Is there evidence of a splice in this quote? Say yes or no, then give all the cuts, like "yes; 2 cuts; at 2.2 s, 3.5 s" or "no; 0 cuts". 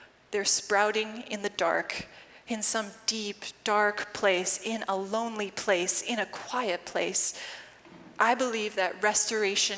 no; 0 cuts